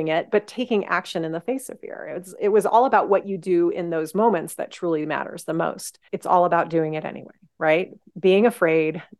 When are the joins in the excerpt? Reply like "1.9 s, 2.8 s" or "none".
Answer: 6.1 s